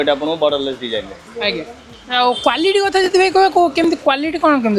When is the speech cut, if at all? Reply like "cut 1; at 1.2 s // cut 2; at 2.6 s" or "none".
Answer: none